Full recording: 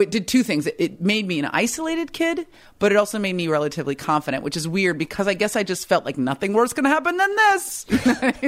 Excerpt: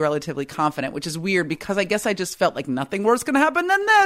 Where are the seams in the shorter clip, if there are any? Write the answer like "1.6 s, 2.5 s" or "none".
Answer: none